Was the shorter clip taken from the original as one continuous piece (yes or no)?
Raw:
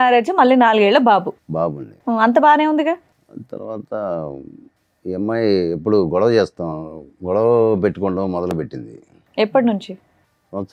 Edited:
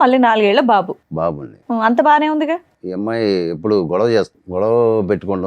no